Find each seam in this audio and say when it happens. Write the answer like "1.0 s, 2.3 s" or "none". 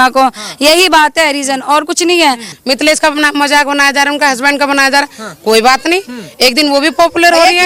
2.5 s